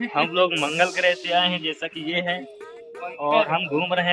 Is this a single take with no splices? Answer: yes; 0 cuts

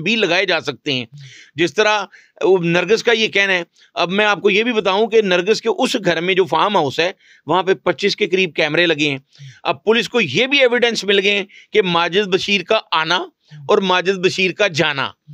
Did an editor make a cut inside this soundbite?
no; 0 cuts

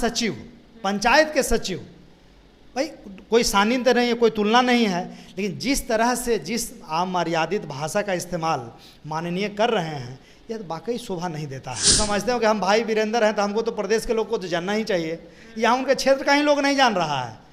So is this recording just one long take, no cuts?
no; 1 cut; at 11.9 s

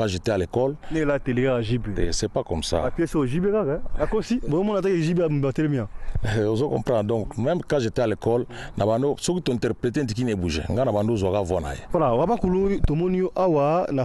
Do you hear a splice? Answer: yes; 1 cut; at 11.8 s

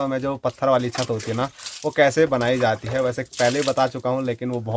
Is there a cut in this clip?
no; 0 cuts

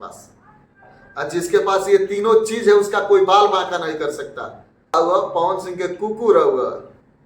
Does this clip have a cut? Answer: yes; 1 cut; at 4.9 s

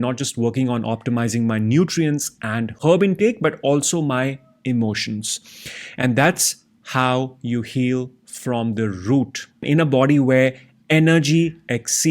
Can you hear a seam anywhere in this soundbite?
yes; 1 cut; at 9.6 s

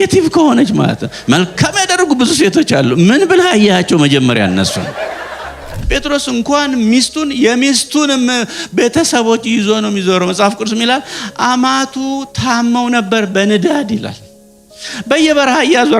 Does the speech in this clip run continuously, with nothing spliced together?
no; 1 cut; at 5.8 s

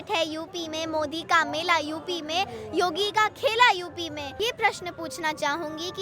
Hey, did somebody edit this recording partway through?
yes; 1 cut; at 4.4 s

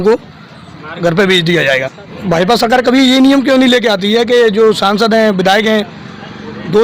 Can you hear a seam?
yes; 1 cut; at 2.1 s

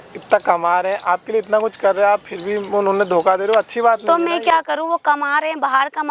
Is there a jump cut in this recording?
no; 0 cuts

